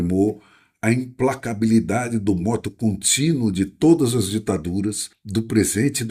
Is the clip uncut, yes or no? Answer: no